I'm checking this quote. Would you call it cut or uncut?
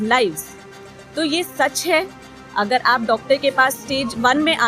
uncut